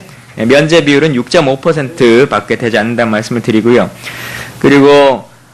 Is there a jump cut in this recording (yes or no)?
no